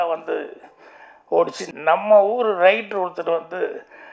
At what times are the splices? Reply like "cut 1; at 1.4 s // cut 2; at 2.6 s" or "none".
cut 1; at 1.6 s